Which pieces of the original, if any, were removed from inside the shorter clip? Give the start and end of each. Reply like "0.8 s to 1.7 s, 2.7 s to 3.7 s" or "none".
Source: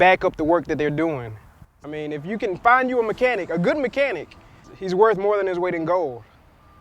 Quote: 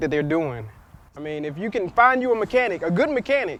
none